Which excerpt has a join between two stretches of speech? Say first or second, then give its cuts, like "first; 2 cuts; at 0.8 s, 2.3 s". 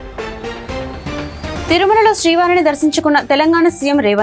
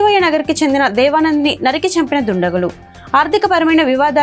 first; 1 cut; at 1.5 s